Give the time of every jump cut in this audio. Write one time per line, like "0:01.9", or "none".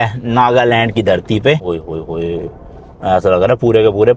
0:01.6